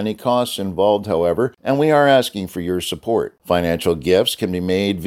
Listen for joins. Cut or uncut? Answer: cut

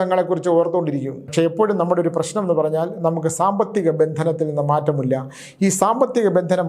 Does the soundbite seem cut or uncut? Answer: cut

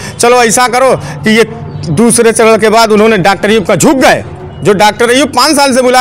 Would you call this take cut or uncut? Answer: uncut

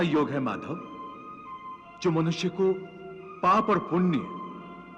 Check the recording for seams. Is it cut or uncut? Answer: uncut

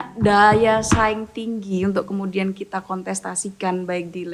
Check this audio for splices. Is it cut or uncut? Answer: uncut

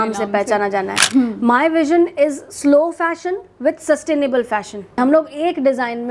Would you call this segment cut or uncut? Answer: cut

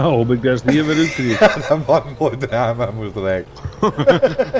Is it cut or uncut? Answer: cut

